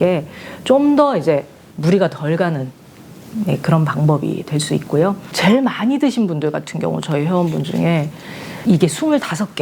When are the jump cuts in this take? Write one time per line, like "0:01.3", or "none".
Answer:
0:05.3

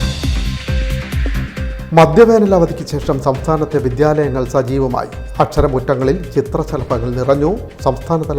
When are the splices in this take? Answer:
0:01.2

